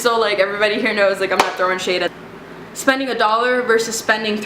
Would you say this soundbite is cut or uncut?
cut